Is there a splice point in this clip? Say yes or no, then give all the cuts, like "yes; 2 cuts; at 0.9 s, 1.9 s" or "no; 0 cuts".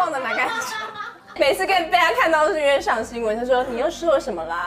yes; 1 cut; at 1.3 s